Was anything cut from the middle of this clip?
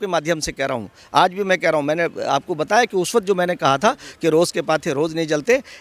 no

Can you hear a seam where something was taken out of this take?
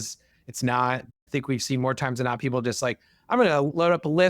yes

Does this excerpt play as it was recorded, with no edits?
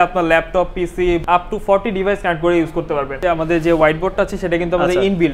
no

